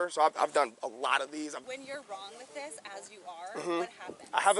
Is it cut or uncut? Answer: cut